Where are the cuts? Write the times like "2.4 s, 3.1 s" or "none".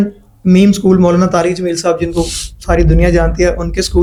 none